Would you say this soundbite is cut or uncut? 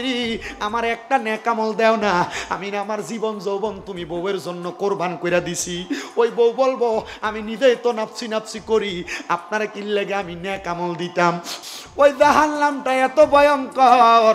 cut